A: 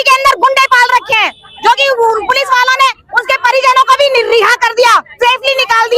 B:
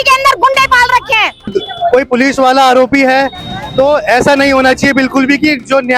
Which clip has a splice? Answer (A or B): B